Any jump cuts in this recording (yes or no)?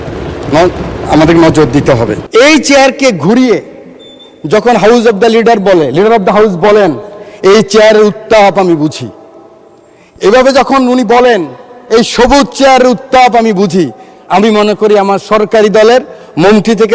yes